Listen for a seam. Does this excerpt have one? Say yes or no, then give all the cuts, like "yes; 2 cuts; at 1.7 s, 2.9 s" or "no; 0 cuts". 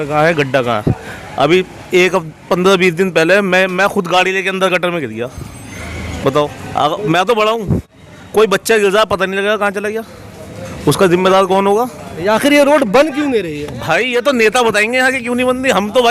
no; 0 cuts